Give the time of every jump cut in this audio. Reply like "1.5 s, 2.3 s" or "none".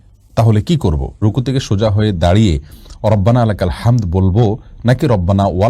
1.2 s